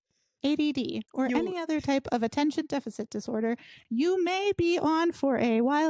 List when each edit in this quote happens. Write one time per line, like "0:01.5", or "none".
none